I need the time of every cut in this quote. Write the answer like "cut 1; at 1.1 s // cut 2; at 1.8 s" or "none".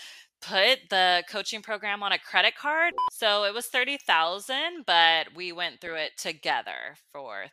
cut 1; at 2.9 s